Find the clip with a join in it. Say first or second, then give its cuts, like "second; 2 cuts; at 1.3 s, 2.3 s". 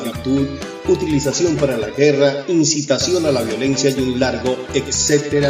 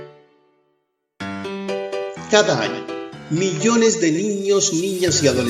second; 1 cut; at 2.2 s